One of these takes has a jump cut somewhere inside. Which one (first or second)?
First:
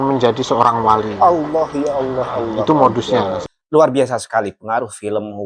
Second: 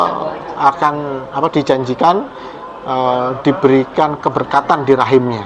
first